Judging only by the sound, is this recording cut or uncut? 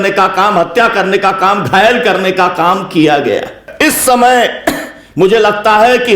cut